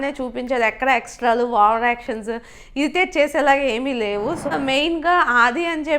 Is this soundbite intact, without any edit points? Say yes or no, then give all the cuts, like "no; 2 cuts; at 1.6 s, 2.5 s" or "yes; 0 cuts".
no; 1 cut; at 4.5 s